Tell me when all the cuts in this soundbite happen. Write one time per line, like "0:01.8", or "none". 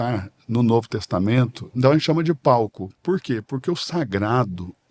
0:01.6